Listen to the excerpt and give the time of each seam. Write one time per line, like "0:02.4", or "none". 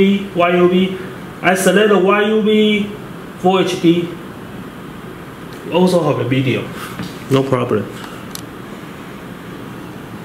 none